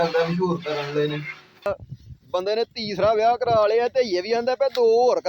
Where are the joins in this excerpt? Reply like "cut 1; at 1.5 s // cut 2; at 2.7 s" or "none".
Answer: cut 1; at 1.7 s